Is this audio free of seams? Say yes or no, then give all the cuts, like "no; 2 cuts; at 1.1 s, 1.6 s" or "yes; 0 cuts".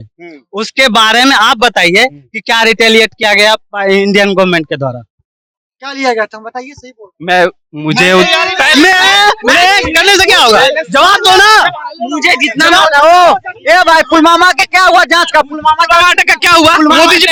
yes; 0 cuts